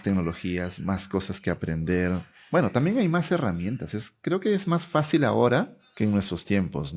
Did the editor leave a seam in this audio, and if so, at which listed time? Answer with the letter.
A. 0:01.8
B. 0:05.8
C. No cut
C